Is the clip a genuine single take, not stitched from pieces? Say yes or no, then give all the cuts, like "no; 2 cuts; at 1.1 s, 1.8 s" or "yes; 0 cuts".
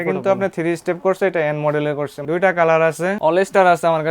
no; 2 cuts; at 2.1 s, 3.2 s